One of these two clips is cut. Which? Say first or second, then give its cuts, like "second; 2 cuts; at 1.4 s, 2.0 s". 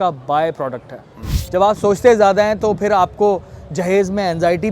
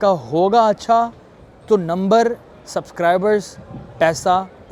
first; 1 cut; at 1.4 s